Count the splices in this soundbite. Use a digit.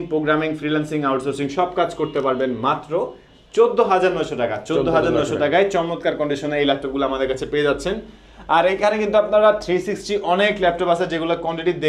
0